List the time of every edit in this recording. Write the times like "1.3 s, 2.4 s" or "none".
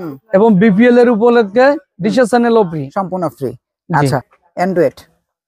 4.3 s